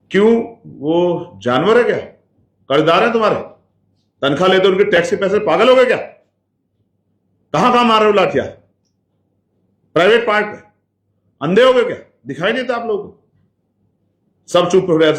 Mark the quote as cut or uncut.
uncut